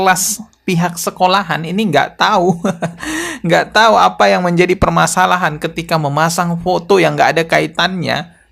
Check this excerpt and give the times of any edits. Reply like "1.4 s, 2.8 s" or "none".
none